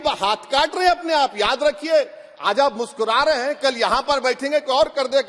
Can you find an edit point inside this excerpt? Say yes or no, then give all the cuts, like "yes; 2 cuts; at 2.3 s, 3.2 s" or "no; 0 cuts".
no; 0 cuts